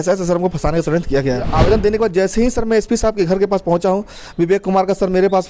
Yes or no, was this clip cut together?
yes